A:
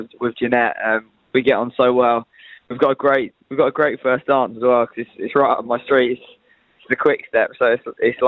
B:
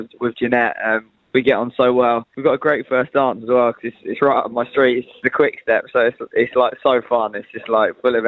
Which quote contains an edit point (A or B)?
B